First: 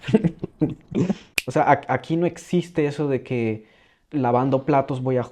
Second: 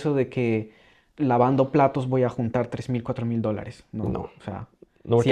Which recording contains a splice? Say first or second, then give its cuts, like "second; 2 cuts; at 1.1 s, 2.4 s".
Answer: first; 1 cut; at 1.3 s